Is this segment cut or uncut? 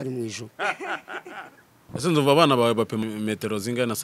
cut